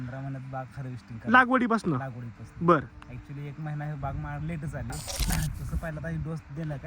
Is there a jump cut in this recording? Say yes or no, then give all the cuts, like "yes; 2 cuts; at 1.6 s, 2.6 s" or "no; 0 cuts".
yes; 1 cut; at 5.1 s